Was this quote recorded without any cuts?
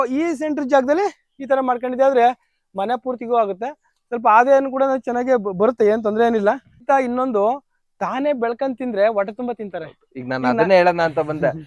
no; 1 cut; at 6.8 s

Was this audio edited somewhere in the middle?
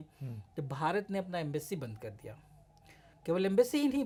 no; 0 cuts

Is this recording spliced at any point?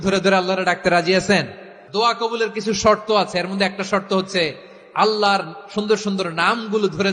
yes; 1 cut; at 1.8 s

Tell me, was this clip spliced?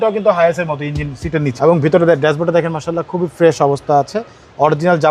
yes; 1 cut; at 1.5 s

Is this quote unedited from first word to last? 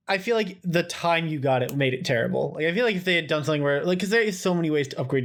yes; 0 cuts

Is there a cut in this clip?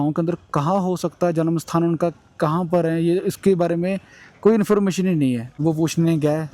yes; 1 cut; at 5.5 s

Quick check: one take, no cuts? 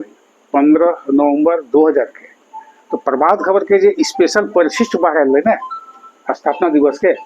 yes; 0 cuts

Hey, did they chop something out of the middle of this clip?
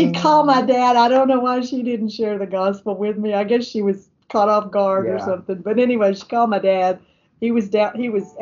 no; 0 cuts

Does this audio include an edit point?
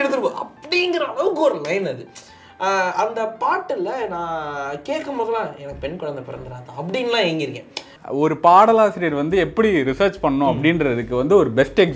yes; 1 cut; at 7.9 s

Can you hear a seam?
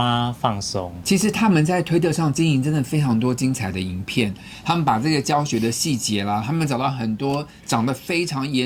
no; 0 cuts

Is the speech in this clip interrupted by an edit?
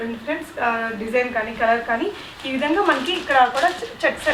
no; 0 cuts

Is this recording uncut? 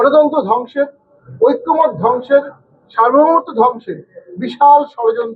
yes; 0 cuts

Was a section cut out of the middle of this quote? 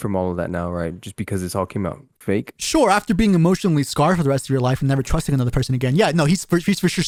no; 0 cuts

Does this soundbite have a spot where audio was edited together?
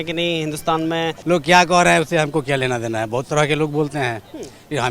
yes; 1 cut; at 1.2 s

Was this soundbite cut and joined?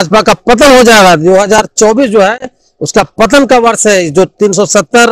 no; 0 cuts

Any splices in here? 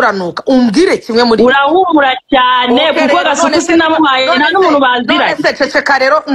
no; 0 cuts

